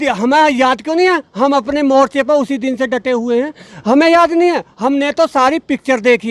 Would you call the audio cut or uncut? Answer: uncut